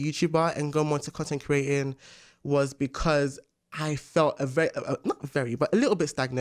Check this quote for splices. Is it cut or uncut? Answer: uncut